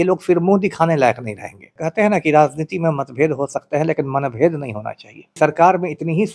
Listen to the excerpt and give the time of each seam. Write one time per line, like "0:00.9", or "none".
0:01.8
0:05.3